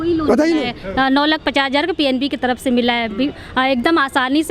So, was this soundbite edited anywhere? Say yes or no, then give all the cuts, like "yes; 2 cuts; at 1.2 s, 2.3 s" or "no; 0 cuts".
no; 0 cuts